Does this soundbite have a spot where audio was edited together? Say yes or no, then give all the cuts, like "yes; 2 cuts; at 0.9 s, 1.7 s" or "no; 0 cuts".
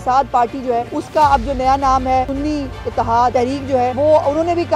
yes; 3 cuts; at 1.0 s, 2.3 s, 3.6 s